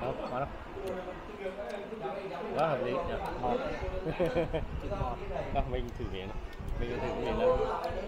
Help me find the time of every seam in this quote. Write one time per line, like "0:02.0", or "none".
none